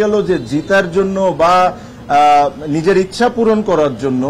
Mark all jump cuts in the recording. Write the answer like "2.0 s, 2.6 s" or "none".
none